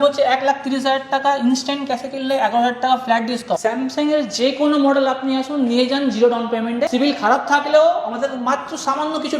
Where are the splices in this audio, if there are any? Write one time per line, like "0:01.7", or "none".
0:03.6
0:06.9